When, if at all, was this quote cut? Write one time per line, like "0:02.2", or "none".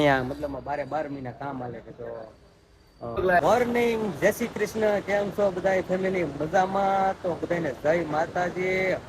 0:03.3